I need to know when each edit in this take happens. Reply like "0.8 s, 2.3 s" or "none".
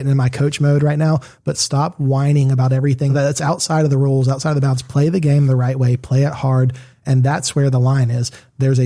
3.1 s, 7.1 s